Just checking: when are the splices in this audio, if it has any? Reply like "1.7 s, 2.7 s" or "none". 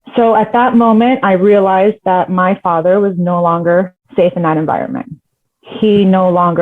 4.0 s